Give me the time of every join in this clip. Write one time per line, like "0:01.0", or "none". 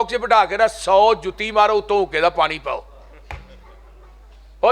none